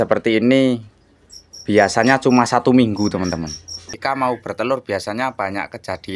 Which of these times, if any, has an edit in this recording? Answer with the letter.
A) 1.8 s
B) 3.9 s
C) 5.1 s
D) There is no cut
B